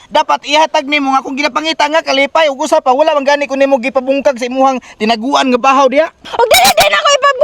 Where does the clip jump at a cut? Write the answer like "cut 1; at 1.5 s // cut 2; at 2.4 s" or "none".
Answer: cut 1; at 6.2 s